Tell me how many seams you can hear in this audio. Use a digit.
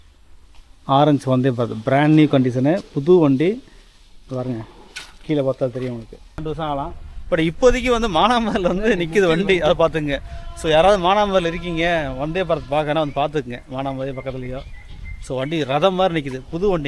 1